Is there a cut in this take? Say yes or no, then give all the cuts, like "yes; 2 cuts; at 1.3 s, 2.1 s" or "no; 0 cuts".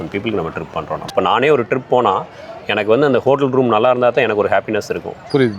yes; 1 cut; at 1.0 s